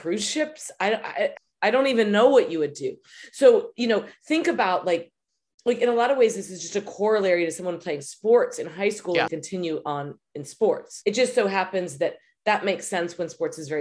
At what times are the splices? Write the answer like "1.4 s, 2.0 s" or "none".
1.4 s, 9.3 s, 10.9 s

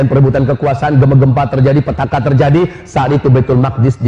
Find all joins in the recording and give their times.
none

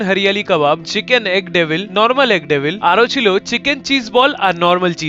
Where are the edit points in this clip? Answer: none

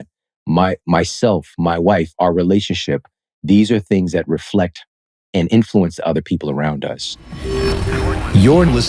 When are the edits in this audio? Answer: 7.5 s

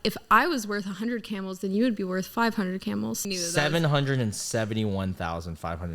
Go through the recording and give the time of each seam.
3.2 s

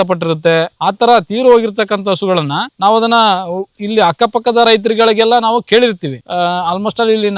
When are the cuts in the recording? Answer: none

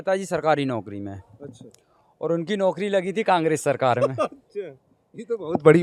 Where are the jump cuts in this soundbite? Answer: none

